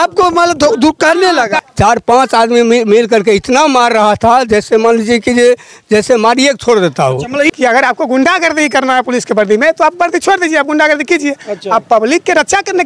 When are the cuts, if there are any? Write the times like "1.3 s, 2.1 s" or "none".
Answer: 1.6 s, 7.5 s